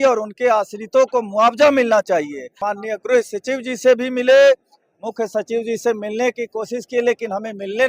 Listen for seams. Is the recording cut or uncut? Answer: cut